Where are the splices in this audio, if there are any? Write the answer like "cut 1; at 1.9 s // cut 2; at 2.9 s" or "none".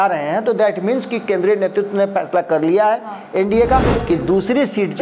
cut 1; at 3.9 s